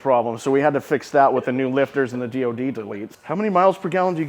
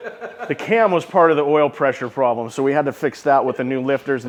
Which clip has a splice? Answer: first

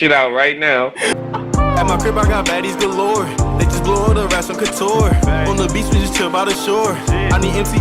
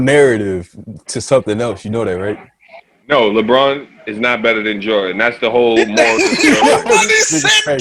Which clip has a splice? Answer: first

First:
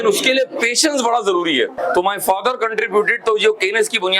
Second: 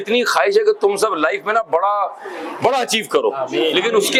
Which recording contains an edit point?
first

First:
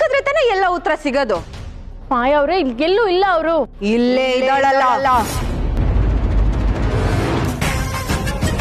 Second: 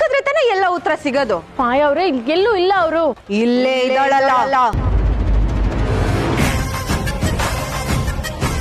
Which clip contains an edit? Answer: second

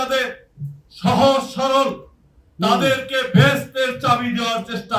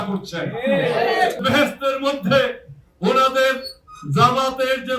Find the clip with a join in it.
second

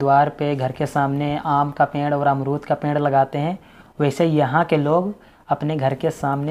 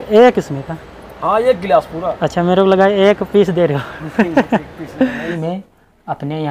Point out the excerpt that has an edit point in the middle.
second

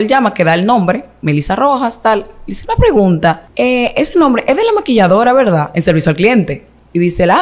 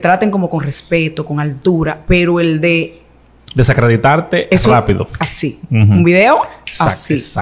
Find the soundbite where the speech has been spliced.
first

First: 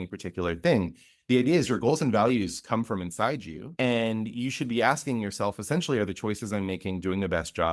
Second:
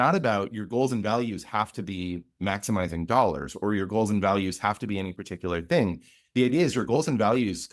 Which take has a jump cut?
first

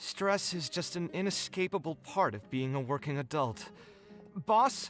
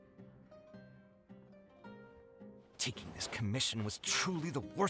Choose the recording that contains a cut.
second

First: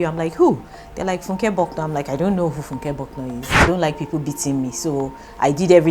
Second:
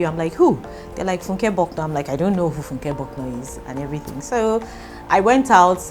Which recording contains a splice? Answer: first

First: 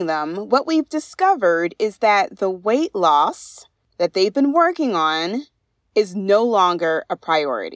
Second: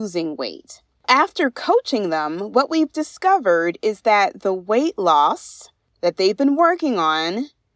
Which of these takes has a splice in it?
second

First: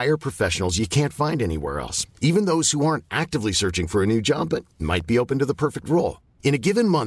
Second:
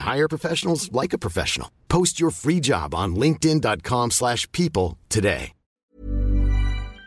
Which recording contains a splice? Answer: second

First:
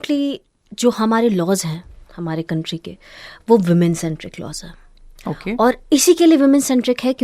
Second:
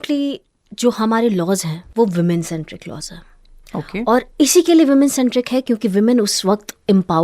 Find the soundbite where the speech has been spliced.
second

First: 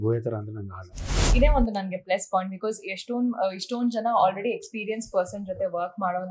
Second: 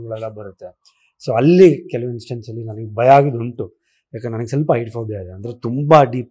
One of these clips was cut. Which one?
first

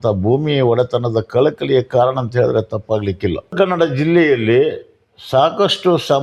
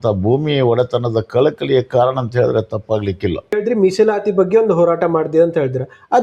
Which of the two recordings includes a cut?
first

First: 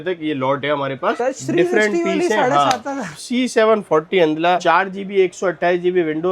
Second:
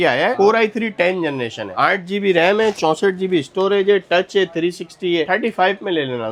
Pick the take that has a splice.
first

